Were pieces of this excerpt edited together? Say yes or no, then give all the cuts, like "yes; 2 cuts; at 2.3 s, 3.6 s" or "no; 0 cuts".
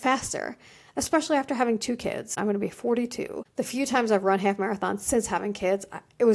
yes; 2 cuts; at 2.4 s, 3.4 s